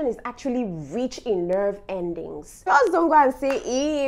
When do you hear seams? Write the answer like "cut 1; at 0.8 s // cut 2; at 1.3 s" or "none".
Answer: cut 1; at 2.5 s